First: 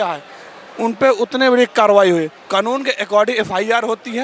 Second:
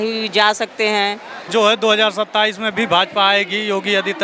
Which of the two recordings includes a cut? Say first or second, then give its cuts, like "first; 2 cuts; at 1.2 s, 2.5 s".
second; 1 cut; at 1.5 s